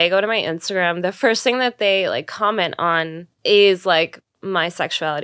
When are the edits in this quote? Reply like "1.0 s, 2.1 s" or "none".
3.2 s, 4.3 s